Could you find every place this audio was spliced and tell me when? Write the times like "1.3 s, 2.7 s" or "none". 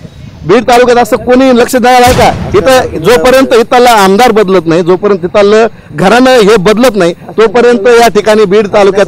none

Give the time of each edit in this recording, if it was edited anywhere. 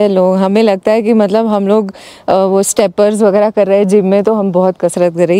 none

